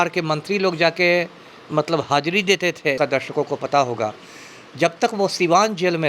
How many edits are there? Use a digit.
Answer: 1